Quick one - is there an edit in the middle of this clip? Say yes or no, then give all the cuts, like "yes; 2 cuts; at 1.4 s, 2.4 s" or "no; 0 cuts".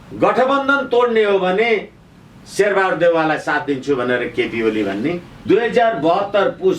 yes; 1 cut; at 5.3 s